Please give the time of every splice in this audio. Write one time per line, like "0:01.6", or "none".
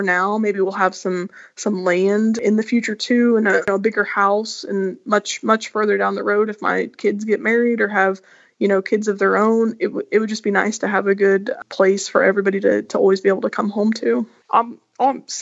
0:14.4